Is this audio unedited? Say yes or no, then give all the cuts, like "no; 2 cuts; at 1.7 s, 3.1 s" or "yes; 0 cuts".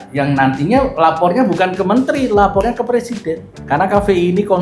no; 1 cut; at 3.5 s